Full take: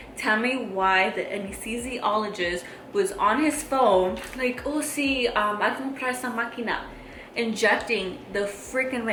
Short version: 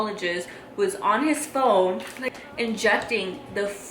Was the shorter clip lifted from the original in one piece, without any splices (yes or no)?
no